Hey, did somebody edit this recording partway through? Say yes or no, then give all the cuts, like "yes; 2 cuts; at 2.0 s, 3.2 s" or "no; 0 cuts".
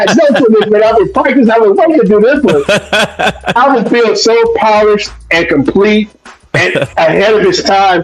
no; 0 cuts